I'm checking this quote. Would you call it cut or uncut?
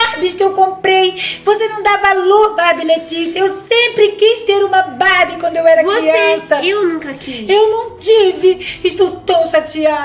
uncut